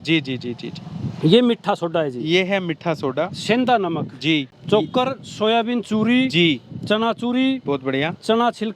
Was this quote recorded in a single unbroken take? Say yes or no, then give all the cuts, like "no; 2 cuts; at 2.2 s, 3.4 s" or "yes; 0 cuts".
no; 1 cut; at 4.5 s